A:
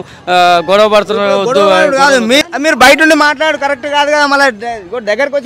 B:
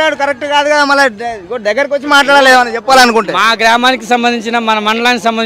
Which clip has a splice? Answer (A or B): A